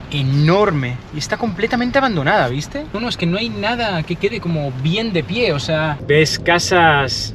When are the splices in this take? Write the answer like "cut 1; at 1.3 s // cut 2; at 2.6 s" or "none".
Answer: cut 1; at 3.0 s // cut 2; at 6.0 s

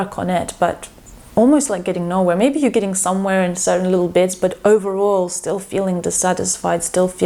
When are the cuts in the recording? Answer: none

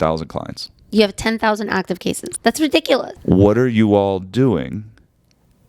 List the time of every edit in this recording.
cut 1; at 2.3 s // cut 2; at 3.1 s

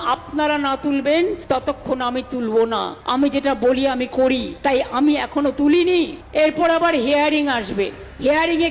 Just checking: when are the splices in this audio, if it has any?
cut 1; at 1.4 s // cut 2; at 3.0 s // cut 3; at 4.8 s // cut 4; at 6.2 s

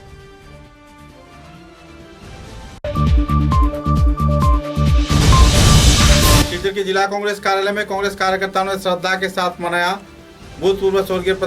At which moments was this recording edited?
cut 1; at 6.5 s

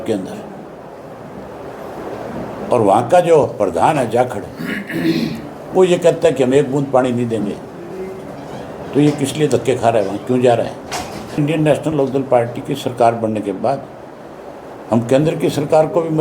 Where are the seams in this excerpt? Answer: cut 1; at 11.4 s

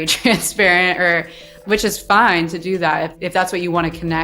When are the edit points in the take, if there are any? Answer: cut 1; at 1.6 s // cut 2; at 3.1 s

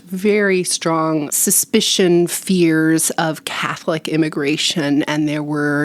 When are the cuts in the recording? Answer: cut 1; at 1.3 s

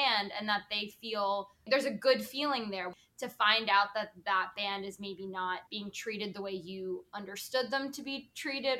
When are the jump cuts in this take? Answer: cut 1; at 1.6 s // cut 2; at 2.9 s // cut 3; at 5.7 s

